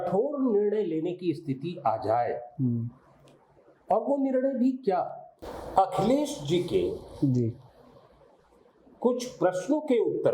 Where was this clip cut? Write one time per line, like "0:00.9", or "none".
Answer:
0:05.6